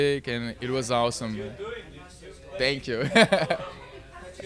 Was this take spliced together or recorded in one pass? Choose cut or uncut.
uncut